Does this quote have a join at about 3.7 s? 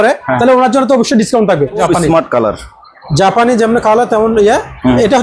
no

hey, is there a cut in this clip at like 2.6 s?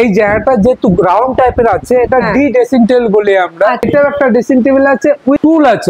no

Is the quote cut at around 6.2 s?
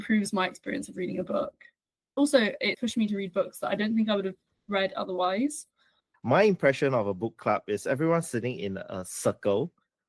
yes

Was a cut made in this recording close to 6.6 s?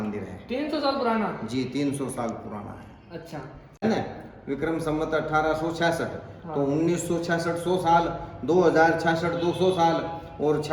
no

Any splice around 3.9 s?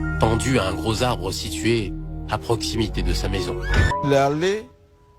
yes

